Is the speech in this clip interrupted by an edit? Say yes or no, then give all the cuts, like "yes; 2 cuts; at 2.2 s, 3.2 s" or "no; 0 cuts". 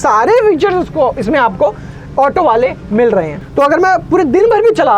yes; 1 cut; at 3.4 s